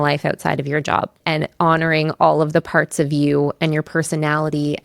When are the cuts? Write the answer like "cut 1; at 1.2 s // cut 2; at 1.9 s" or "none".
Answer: cut 1; at 1.2 s